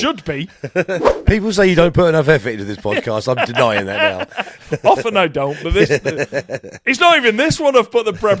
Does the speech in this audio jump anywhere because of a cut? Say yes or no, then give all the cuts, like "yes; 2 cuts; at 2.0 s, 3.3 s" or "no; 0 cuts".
yes; 1 cut; at 1.1 s